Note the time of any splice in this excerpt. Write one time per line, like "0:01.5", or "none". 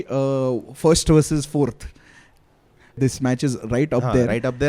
0:02.9